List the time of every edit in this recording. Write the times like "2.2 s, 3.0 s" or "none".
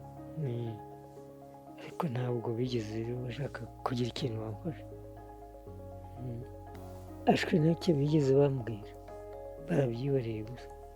6.8 s